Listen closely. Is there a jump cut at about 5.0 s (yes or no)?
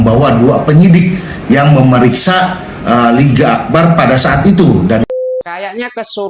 yes